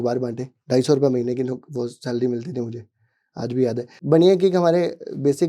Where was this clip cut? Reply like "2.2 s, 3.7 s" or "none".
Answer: 3.5 s